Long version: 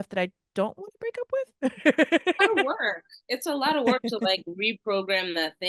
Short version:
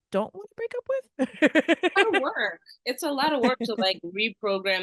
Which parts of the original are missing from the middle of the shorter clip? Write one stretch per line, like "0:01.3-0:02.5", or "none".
none